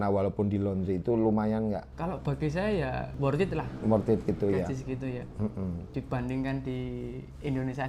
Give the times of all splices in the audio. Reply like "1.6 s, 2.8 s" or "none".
1.9 s, 3.1 s, 5.8 s